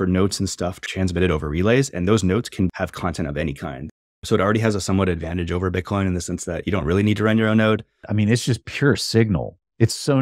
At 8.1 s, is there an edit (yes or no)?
yes